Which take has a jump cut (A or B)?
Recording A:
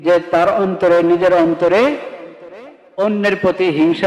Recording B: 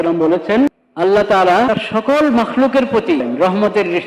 B